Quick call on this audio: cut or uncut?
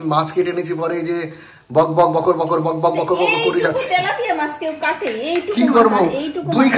uncut